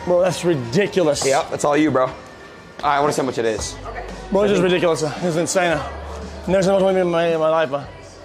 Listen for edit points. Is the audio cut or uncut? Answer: cut